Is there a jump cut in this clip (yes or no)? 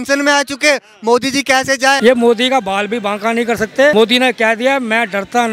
yes